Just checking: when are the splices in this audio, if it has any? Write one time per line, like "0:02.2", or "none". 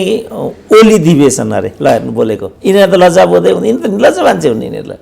0:02.5